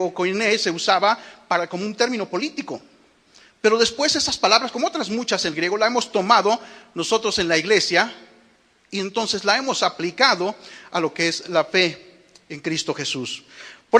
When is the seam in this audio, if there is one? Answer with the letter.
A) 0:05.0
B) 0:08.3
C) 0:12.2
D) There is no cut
A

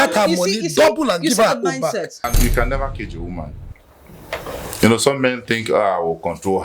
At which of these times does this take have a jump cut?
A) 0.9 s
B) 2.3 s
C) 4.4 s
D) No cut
B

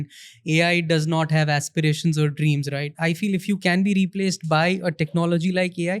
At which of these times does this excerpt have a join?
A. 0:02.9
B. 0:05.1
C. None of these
A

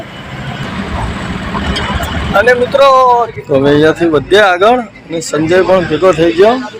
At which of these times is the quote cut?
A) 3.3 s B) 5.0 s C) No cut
A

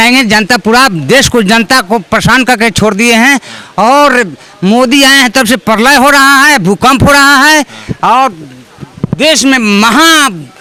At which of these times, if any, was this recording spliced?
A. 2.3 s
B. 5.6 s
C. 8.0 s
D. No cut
D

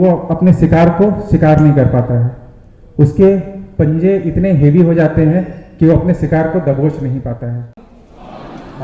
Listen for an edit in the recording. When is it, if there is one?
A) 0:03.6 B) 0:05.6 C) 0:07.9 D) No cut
C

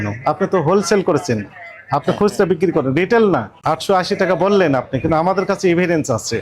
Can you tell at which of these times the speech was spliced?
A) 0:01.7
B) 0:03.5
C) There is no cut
B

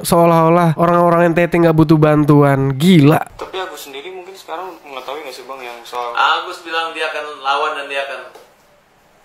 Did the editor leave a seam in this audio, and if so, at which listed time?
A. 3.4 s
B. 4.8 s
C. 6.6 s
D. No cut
D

